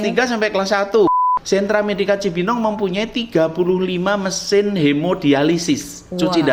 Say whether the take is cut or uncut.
cut